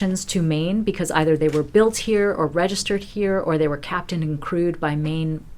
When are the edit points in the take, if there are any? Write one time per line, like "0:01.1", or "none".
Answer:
none